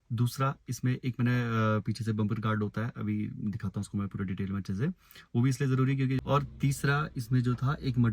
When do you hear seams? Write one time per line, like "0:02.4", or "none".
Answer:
0:06.2